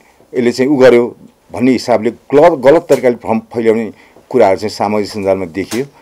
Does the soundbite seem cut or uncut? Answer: uncut